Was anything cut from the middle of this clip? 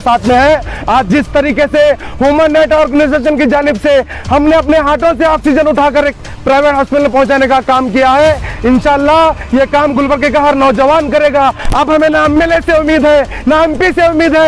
no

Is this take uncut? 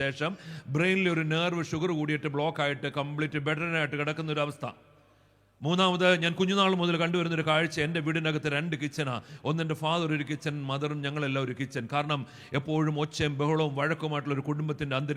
yes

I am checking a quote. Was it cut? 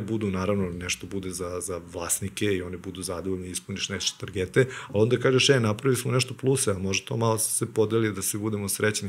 no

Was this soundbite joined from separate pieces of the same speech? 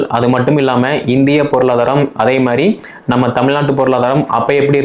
no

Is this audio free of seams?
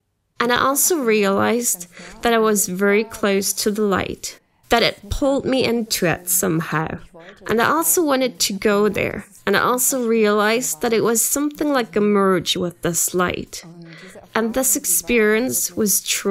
yes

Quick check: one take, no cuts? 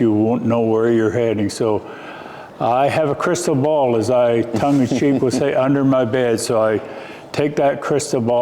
yes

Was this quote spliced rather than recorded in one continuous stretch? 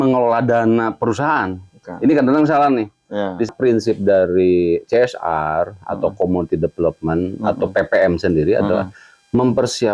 yes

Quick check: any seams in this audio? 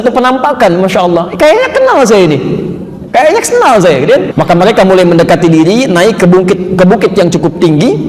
yes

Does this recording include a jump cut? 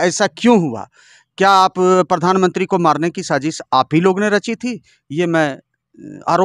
no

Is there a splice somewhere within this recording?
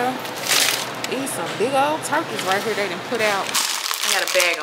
yes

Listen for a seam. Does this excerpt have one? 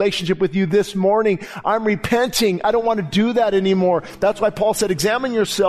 no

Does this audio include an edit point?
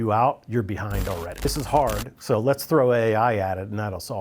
yes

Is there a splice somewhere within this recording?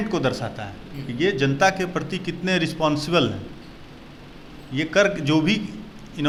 no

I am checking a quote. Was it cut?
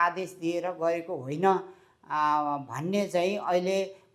no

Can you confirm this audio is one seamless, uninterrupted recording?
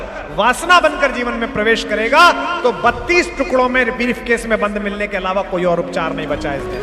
yes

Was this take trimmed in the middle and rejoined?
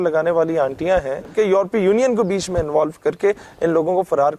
yes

